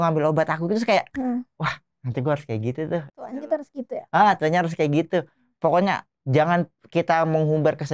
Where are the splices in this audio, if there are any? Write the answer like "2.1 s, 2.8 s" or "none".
none